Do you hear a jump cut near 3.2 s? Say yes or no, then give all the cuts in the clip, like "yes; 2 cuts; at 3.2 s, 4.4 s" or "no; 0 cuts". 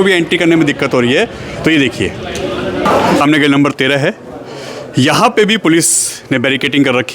yes; 1 cut; at 3.2 s